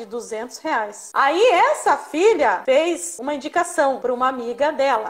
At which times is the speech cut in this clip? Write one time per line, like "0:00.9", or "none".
0:01.0
0:02.8
0:04.0